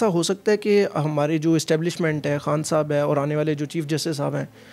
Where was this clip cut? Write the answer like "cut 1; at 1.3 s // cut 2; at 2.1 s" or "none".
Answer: none